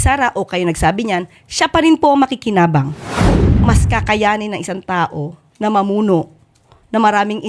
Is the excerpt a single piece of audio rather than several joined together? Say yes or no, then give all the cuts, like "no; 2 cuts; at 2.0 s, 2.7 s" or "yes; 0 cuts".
no; 1 cut; at 3.5 s